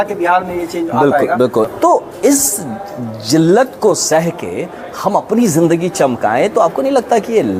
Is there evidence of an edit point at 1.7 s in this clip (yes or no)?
yes